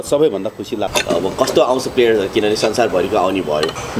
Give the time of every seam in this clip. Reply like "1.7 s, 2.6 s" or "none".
0.9 s